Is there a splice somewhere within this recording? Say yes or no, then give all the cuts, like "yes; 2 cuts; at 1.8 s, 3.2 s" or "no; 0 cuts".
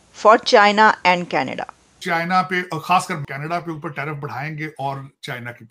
yes; 2 cuts; at 2.0 s, 3.2 s